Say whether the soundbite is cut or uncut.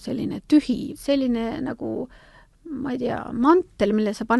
cut